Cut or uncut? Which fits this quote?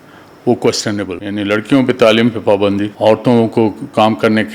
cut